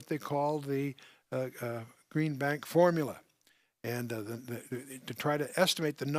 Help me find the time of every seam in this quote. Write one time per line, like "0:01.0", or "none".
none